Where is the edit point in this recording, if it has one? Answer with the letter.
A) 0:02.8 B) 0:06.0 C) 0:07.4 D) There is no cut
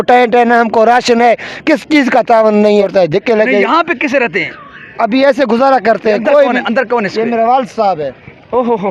A